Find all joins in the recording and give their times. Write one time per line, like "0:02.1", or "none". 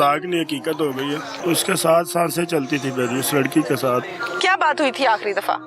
0:01.3
0:04.1